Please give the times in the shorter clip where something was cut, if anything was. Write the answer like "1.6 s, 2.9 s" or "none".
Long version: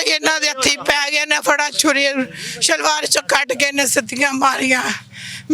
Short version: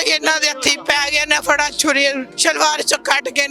2.3 s